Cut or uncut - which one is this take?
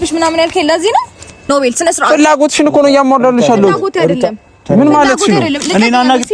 cut